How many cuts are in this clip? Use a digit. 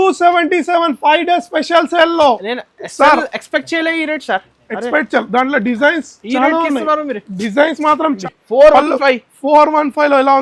1